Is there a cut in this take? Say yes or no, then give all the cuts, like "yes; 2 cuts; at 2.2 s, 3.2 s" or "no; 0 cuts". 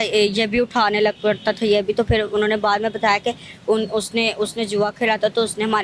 no; 0 cuts